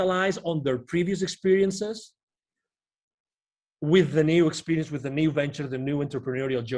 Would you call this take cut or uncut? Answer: uncut